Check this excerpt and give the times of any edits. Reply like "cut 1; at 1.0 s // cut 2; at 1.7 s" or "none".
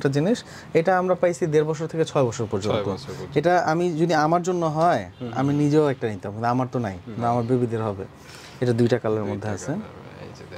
none